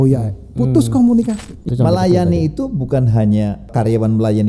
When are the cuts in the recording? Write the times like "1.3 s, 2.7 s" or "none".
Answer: 1.6 s, 3.6 s